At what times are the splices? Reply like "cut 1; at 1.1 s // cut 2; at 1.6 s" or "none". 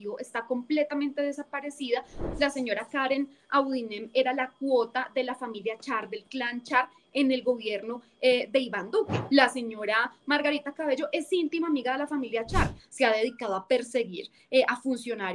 cut 1; at 2.1 s // cut 2; at 9.2 s // cut 3; at 12.8 s